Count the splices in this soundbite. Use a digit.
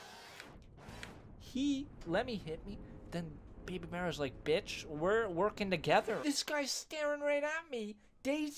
1